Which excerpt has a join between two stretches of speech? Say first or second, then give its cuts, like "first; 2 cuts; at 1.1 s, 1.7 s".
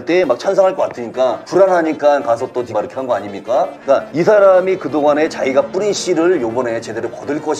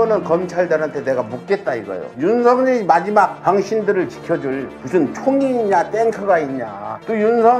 first; 3 cuts; at 1.4 s, 2.7 s, 4.0 s